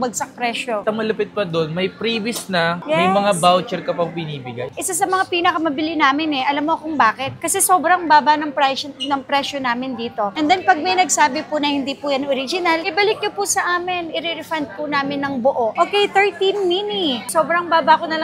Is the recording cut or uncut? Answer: cut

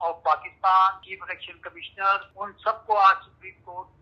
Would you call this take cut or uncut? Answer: cut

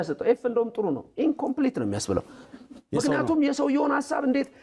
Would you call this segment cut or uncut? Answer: uncut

